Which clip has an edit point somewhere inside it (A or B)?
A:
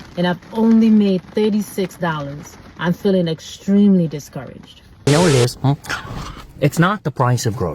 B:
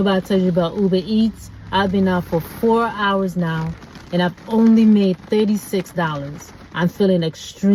A